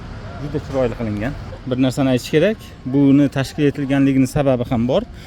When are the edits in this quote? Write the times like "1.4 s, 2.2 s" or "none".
1.5 s